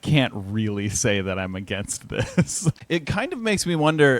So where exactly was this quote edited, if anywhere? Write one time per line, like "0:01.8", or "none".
0:02.8

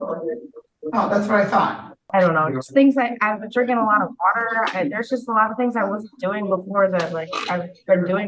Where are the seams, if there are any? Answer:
0:02.0

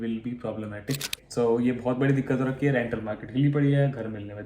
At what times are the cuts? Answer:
0:01.2

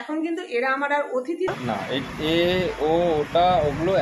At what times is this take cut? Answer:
0:01.5

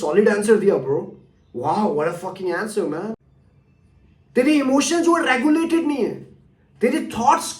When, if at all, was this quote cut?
0:03.1

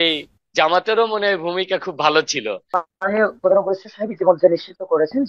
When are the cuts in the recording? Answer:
0:02.6

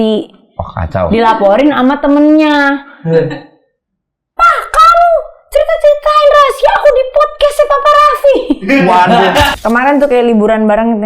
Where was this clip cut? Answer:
0:09.5

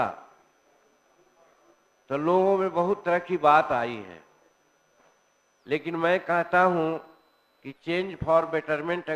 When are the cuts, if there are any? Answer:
none

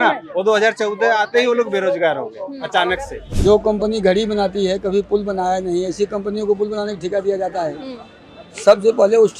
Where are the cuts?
0:03.2

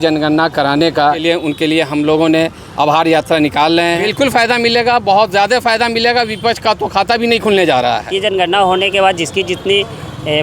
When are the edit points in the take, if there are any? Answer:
0:01.2
0:04.4
0:08.1

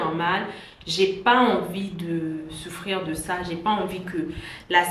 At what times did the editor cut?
none

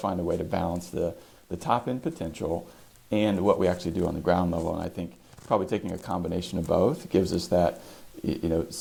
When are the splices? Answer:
none

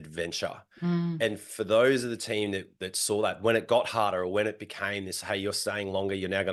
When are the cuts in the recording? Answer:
none

